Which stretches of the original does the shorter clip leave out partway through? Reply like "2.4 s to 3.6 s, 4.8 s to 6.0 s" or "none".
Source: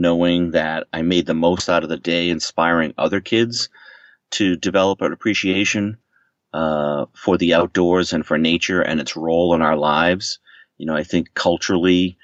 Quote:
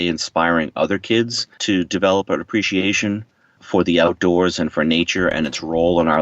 3.7 s to 4.2 s, 6.3 s to 7.1 s